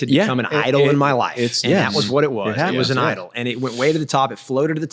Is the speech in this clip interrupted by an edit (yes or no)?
no